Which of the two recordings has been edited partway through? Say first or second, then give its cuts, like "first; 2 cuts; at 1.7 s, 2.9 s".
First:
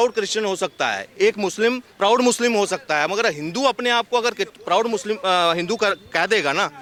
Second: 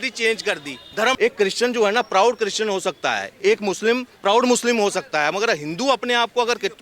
second; 1 cut; at 1.2 s